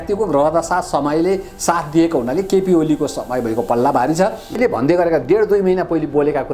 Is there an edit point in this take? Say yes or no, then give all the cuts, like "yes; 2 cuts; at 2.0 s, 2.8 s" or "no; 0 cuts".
yes; 1 cut; at 4.6 s